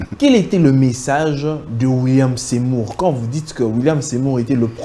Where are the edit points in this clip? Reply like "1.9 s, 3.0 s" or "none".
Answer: none